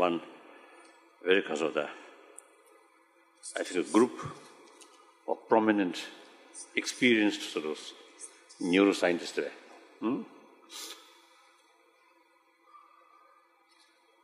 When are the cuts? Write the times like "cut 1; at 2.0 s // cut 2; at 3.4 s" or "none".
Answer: cut 1; at 11.4 s